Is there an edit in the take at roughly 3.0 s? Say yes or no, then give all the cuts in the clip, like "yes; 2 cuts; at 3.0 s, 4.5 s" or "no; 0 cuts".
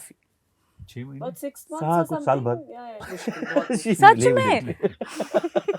yes; 1 cut; at 3.0 s